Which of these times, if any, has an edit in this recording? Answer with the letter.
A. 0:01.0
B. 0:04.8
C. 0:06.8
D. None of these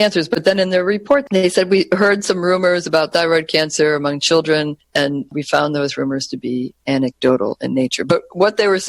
B